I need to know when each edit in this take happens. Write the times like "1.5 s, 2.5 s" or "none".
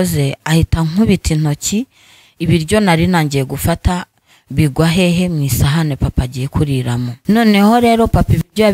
7.1 s